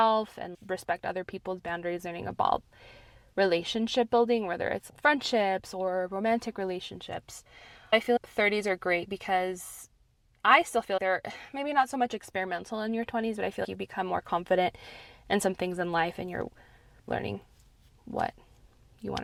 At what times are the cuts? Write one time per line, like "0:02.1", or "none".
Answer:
none